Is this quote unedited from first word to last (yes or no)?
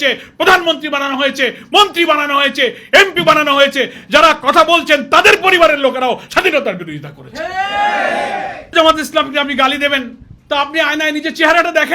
no